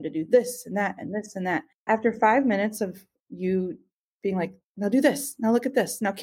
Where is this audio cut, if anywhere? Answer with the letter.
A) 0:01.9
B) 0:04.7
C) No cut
A